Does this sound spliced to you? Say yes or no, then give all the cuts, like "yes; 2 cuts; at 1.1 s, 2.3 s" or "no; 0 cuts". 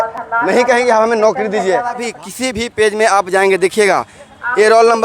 yes; 1 cut; at 2.1 s